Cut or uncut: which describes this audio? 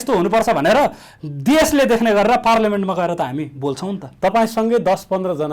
uncut